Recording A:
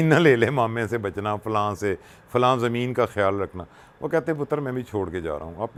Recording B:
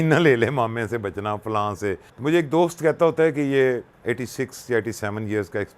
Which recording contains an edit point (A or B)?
B